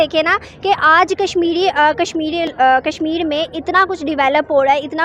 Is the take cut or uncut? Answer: uncut